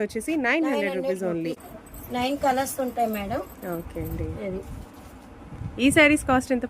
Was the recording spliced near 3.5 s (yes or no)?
no